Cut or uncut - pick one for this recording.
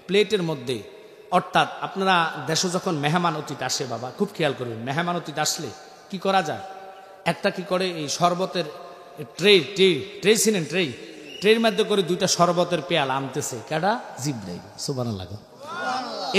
uncut